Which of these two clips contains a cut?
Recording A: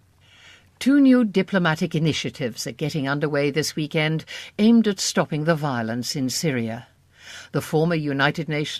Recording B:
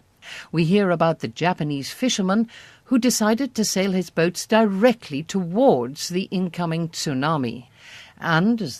B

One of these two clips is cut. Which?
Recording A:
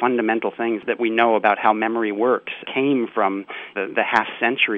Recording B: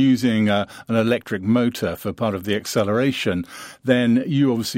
A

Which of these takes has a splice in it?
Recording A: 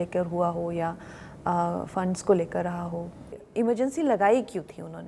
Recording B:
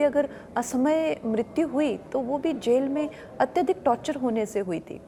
A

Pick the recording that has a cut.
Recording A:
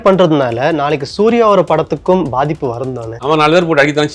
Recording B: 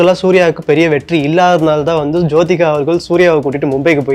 A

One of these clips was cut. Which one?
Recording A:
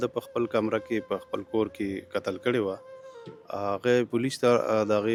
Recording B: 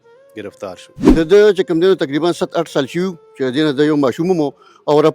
B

